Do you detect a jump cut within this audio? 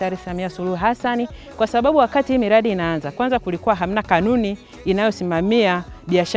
no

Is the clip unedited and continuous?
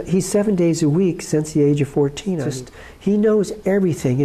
no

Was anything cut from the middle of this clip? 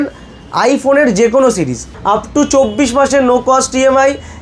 yes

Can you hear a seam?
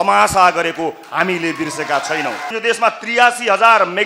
yes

